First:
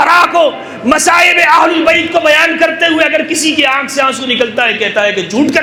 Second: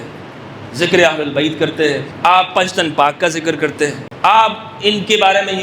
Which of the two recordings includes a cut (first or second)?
second